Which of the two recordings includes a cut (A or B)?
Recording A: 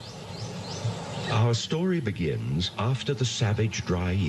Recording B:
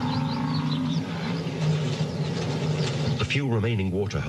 A